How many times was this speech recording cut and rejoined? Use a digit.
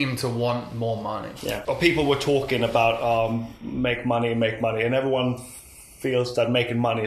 1